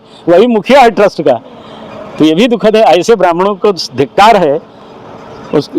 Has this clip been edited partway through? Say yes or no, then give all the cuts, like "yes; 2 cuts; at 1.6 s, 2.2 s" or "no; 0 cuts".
no; 0 cuts